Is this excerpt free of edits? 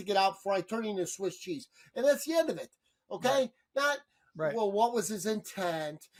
yes; 0 cuts

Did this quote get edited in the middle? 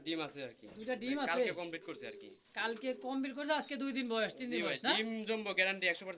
no; 0 cuts

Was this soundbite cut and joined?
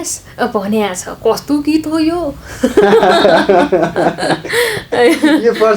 no; 0 cuts

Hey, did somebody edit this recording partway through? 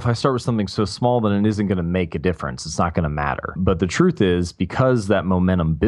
yes; 1 cut; at 3.6 s

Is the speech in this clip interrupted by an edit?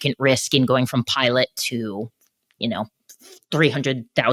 no; 0 cuts

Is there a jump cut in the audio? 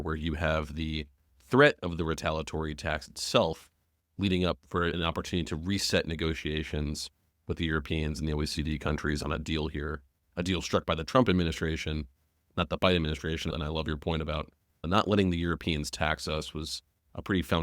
yes; 3 cuts; at 5.0 s, 13.5 s, 14.7 s

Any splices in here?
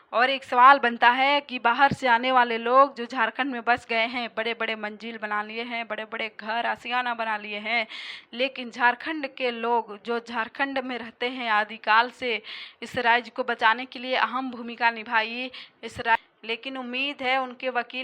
yes; 1 cut; at 16.2 s

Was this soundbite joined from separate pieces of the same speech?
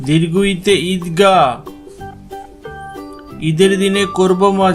yes; 2 cuts; at 2.0 s, 3.4 s

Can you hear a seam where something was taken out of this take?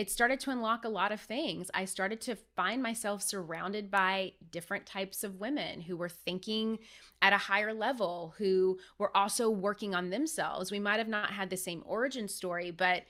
no; 0 cuts

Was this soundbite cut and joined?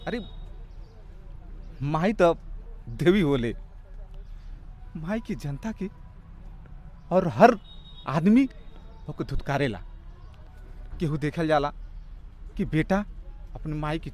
no; 0 cuts

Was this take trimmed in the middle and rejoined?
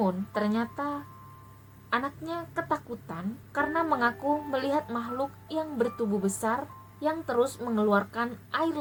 no; 0 cuts

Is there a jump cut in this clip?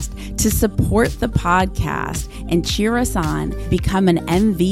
no; 0 cuts

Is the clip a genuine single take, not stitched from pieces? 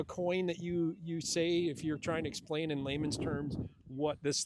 yes; 0 cuts

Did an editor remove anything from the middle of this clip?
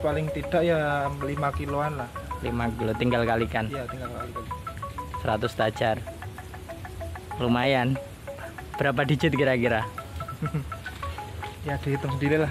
no; 0 cuts

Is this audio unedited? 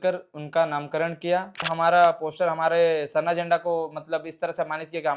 no; 1 cut; at 1.7 s

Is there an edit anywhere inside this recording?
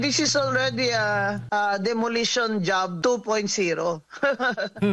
yes; 2 cuts; at 1.4 s, 2.9 s

